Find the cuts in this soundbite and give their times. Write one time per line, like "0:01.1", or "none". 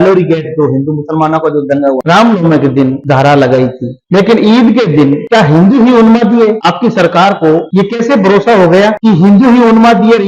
0:02.0
0:03.0
0:03.9
0:05.2
0:06.6
0:07.7
0:09.0